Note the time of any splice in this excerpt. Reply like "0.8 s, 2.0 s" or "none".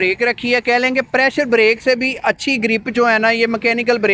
none